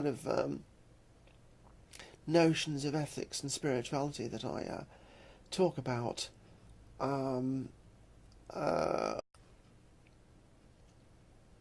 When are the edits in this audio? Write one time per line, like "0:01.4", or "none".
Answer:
none